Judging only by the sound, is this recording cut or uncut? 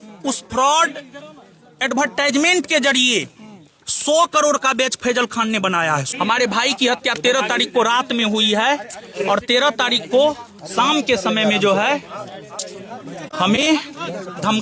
cut